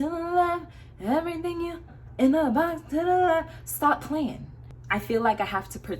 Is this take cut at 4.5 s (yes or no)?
yes